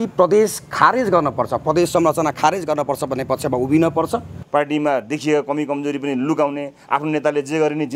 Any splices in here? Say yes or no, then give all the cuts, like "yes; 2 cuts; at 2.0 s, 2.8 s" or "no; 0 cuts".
yes; 1 cut; at 4.4 s